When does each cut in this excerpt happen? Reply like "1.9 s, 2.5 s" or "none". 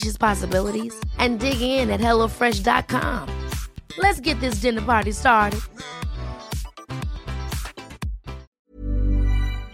8.5 s